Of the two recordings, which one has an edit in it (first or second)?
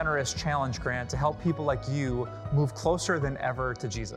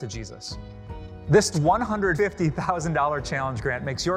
first